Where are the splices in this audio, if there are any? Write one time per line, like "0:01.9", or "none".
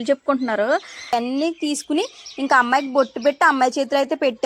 0:01.1